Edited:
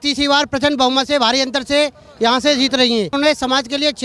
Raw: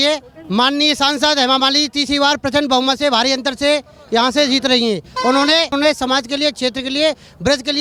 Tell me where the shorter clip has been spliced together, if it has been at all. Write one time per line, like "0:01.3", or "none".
0:03.1

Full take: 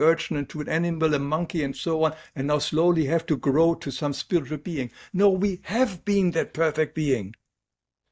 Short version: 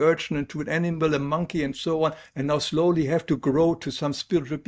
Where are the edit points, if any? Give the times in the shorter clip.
none

